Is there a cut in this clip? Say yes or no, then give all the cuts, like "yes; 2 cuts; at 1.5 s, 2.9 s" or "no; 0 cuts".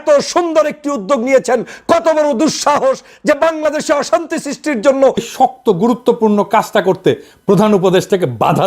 yes; 1 cut; at 5.2 s